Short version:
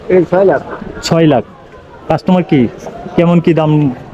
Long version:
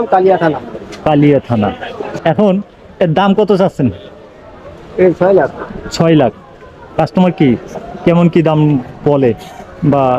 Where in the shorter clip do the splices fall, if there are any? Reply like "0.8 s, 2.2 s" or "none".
none